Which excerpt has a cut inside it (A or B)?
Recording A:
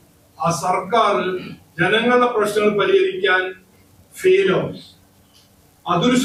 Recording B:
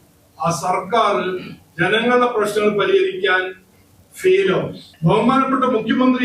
B